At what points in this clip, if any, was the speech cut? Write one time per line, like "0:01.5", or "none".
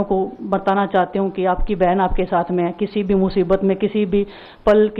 none